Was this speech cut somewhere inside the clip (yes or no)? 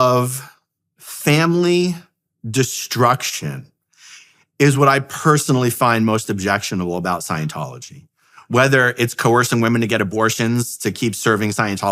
no